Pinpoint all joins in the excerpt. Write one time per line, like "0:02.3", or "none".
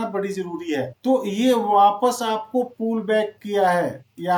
none